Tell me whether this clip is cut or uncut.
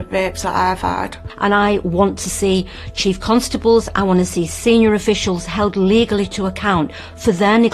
cut